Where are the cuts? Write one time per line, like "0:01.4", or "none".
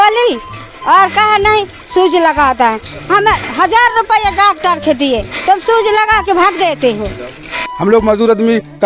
0:07.6